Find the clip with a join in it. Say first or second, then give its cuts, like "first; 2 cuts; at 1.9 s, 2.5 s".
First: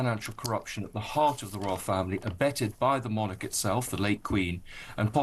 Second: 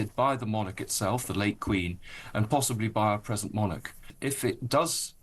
second; 1 cut; at 4.1 s